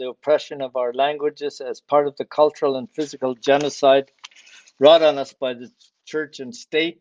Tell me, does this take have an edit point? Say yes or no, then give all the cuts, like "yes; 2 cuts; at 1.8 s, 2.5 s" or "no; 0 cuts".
no; 0 cuts